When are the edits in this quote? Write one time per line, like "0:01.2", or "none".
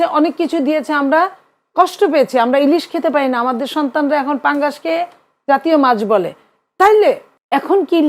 none

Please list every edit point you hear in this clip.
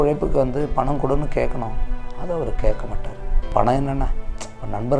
0:03.5

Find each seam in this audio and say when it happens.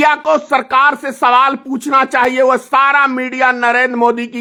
none

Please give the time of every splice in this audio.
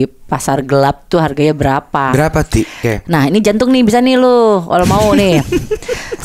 0:02.8

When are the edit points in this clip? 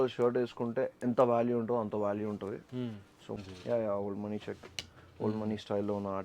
0:03.4

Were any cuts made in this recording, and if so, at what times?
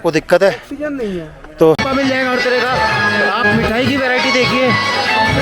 0:01.8

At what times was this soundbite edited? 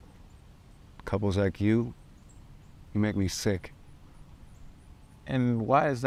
none

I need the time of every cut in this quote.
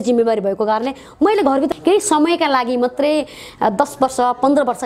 0:01.7

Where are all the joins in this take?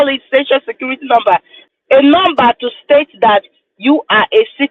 0:01.6

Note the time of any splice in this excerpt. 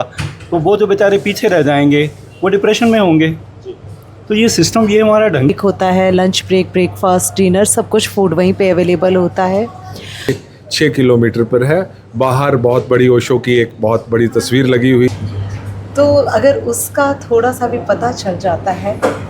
0:05.5
0:10.3
0:15.1

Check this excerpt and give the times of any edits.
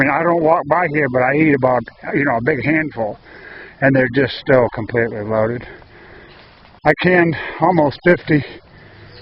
none

